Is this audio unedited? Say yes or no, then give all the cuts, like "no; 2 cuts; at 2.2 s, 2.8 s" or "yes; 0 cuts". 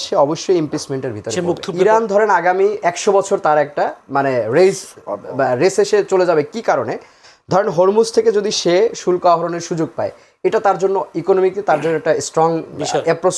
no; 1 cut; at 1.7 s